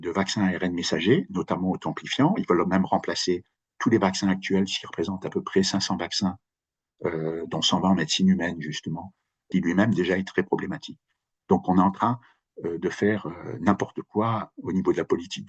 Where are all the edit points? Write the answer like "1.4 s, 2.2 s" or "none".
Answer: 9.5 s